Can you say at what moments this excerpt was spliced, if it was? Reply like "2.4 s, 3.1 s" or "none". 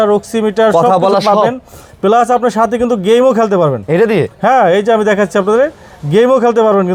none

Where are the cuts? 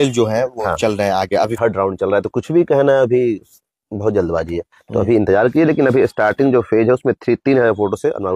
1.5 s

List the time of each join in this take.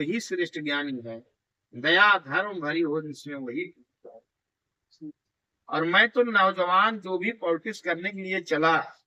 none

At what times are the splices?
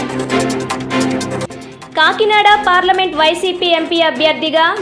1.4 s

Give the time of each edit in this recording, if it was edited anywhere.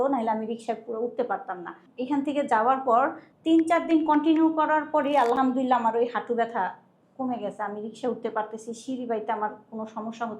1.8 s, 3.3 s

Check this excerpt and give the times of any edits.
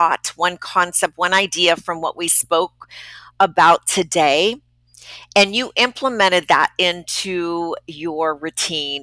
none

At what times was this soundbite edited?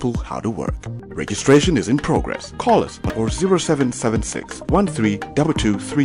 none

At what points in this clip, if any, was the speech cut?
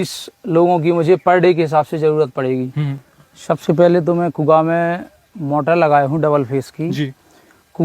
2.9 s

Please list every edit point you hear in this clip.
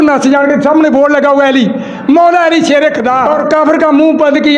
3.3 s

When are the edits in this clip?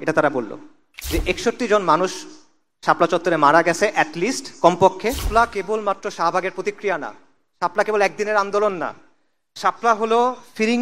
0.9 s, 5.3 s

